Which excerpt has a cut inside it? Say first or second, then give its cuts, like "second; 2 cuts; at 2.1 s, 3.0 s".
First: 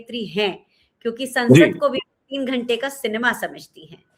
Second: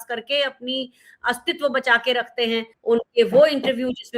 second; 1 cut; at 2.7 s